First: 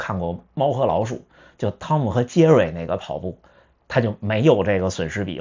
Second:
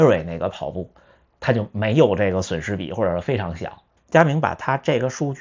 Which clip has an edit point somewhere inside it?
second; 1 cut; at 3.9 s

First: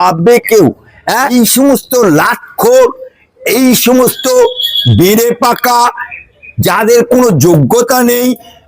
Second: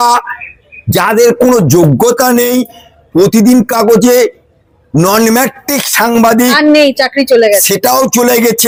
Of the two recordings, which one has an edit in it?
first; 1 cut; at 1.2 s

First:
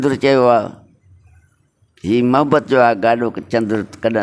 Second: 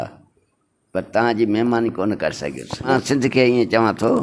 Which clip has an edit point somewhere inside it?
second; 1 cut; at 2.9 s

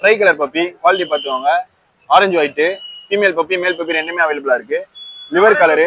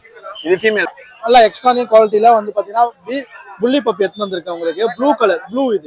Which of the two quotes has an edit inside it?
second; 1 cut; at 0.9 s

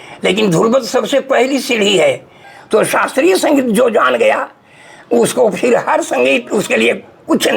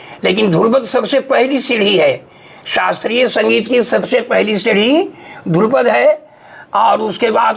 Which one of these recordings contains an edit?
first; 1 cut; at 2.6 s

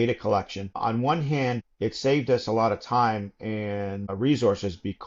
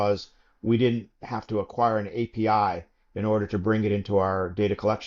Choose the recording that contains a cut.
first; 3 cuts; at 0.8 s, 1.7 s, 4.1 s

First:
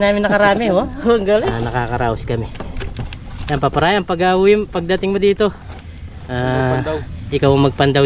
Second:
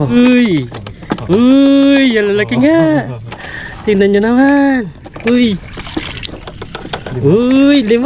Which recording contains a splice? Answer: first; 1 cut; at 1.5 s

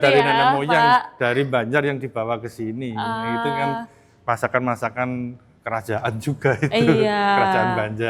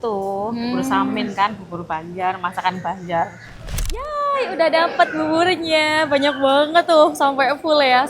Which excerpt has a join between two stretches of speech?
second; 1 cut; at 3.7 s

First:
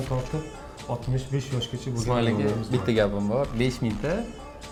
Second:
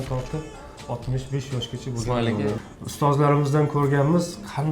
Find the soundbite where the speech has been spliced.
second; 1 cut; at 2.6 s

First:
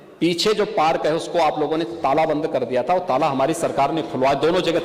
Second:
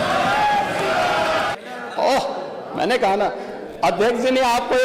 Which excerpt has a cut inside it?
second; 1 cut; at 1.5 s

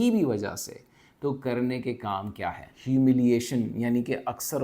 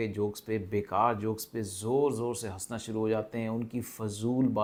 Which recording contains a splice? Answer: first; 1 cut; at 2.7 s

